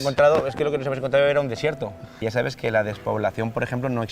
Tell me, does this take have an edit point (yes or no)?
yes